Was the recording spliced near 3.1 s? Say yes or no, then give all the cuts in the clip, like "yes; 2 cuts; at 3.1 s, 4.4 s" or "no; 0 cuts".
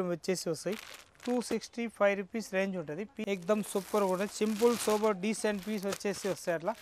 yes; 1 cut; at 3.1 s